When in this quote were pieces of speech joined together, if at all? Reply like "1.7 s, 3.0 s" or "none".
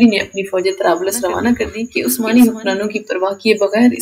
1.8 s